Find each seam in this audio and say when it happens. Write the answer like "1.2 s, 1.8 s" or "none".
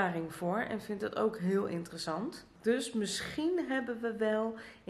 2.5 s